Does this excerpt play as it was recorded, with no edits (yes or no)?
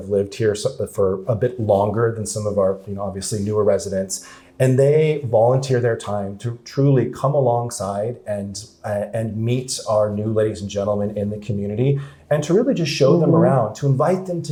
yes